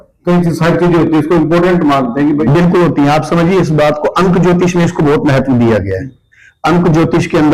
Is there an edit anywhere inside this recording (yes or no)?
yes